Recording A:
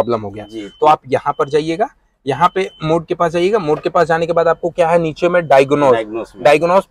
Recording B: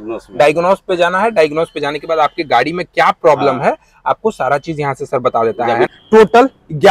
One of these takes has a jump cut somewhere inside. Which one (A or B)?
B